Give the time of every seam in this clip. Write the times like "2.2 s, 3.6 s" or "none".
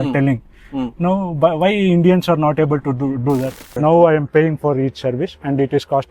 3.7 s